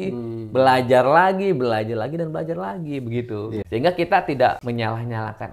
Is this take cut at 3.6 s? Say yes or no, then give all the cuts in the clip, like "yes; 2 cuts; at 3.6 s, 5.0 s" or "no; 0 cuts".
yes; 2 cuts; at 3.6 s, 4.6 s